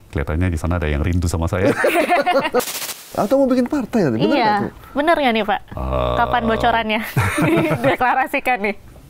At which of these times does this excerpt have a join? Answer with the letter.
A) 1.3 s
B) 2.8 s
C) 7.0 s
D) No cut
B